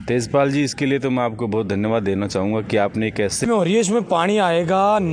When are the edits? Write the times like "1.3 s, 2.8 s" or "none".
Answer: 3.4 s